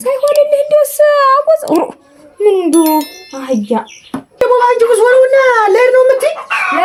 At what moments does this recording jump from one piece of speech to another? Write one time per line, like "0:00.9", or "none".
none